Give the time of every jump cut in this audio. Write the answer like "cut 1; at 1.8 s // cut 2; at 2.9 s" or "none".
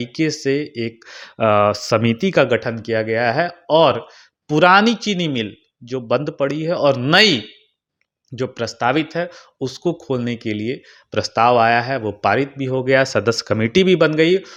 none